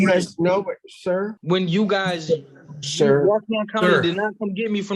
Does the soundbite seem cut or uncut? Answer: cut